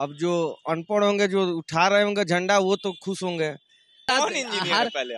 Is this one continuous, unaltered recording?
no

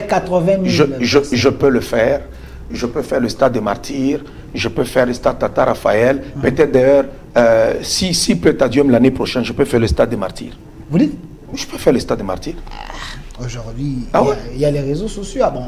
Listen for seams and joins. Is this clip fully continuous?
yes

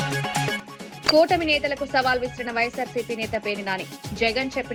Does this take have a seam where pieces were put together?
no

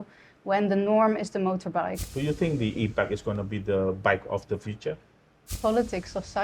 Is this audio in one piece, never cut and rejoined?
no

